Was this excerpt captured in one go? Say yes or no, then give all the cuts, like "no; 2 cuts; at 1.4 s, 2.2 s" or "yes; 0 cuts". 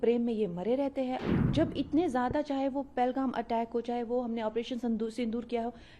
no; 1 cut; at 1.2 s